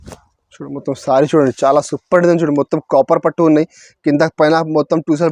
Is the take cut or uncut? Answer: uncut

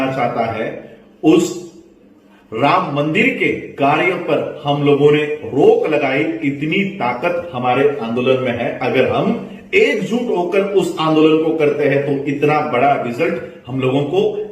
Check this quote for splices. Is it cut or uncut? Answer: uncut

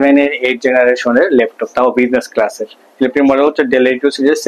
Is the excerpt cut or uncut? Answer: uncut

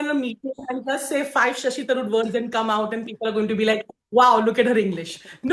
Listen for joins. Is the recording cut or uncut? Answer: uncut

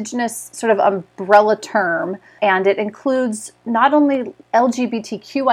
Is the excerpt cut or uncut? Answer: uncut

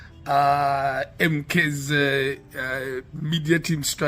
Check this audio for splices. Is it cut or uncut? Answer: cut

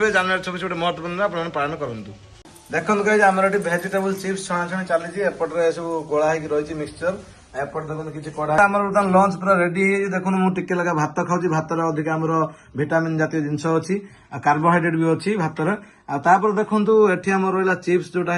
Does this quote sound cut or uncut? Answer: cut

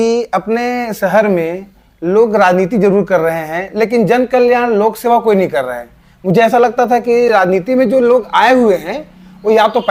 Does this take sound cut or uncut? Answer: uncut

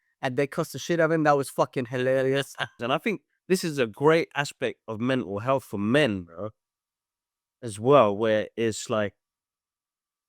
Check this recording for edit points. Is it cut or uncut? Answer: cut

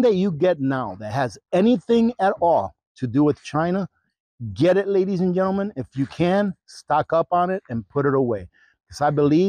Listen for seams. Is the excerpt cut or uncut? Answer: uncut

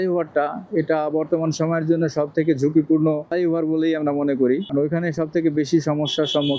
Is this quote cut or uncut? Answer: uncut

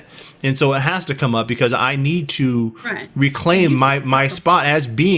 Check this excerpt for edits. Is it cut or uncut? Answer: uncut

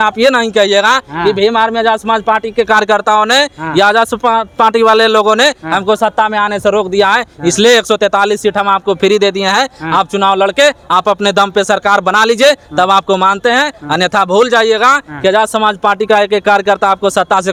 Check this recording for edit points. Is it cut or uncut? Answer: uncut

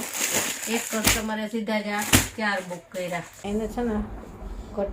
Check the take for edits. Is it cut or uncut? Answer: cut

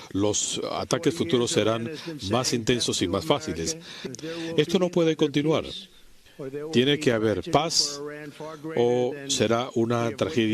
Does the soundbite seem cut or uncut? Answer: uncut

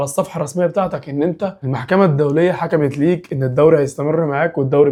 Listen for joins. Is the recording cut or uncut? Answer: uncut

